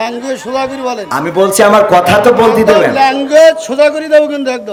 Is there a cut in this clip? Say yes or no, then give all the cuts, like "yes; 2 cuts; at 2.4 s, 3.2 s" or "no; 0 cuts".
no; 0 cuts